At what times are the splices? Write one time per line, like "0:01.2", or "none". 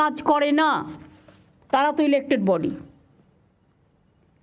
none